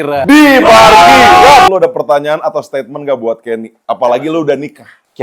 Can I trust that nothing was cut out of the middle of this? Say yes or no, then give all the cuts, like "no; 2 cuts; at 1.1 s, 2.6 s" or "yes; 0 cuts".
no; 1 cut; at 1.7 s